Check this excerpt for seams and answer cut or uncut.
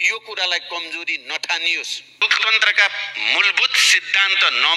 cut